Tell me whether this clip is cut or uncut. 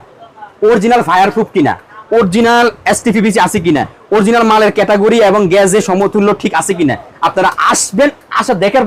uncut